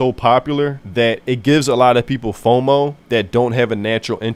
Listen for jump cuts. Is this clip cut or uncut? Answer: uncut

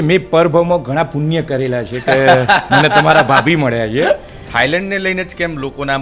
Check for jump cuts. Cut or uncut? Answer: cut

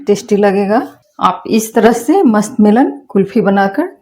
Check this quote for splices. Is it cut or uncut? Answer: cut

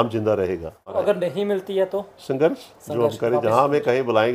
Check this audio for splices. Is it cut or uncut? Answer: cut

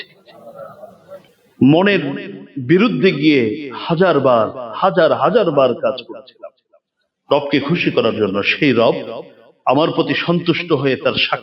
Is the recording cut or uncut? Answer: cut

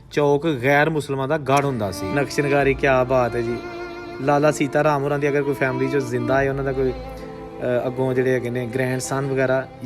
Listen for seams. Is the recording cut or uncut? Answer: cut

